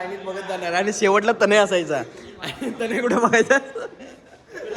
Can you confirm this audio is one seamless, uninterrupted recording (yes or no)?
yes